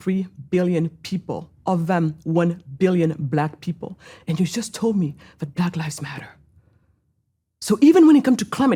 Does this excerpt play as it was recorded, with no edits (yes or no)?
yes